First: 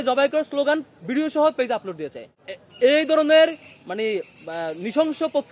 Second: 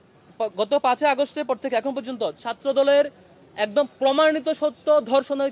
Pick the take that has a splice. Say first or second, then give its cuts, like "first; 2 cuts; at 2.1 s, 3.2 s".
first; 1 cut; at 2.4 s